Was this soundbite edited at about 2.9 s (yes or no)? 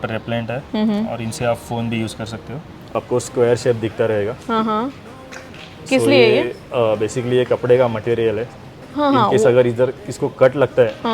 yes